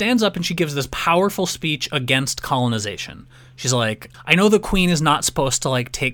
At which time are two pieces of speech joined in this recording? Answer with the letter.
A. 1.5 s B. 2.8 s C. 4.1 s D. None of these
C